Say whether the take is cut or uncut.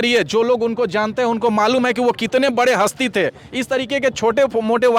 uncut